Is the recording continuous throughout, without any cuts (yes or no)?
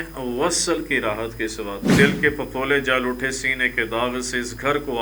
no